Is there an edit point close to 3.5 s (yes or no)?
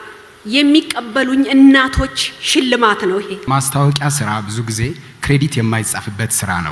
yes